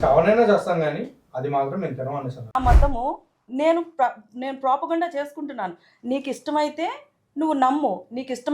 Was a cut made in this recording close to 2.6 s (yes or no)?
yes